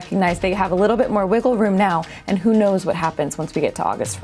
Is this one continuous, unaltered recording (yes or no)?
yes